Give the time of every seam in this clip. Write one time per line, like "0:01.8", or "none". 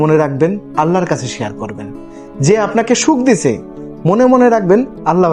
none